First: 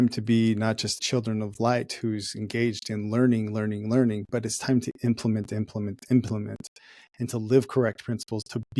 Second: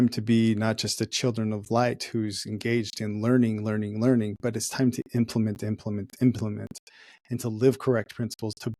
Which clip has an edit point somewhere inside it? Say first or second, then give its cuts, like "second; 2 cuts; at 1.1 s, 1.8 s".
first; 1 cut; at 1.0 s